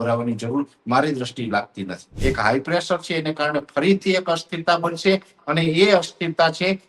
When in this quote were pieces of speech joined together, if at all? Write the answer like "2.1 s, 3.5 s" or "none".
2.1 s